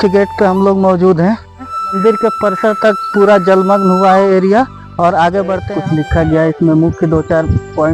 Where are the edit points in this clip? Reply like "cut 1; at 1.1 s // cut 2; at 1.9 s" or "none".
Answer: cut 1; at 1.8 s // cut 2; at 5.6 s